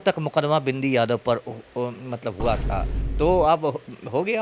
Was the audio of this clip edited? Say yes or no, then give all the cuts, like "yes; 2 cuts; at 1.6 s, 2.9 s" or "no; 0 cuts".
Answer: yes; 1 cut; at 3.0 s